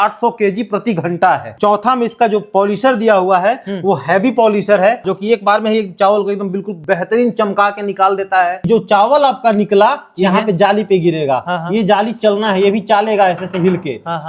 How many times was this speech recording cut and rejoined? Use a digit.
4